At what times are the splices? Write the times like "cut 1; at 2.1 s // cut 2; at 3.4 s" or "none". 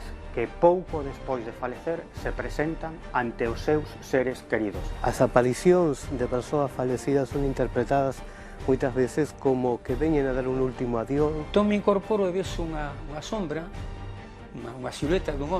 cut 1; at 4.9 s // cut 2; at 11.4 s